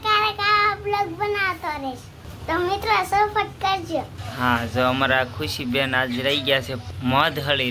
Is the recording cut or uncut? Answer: cut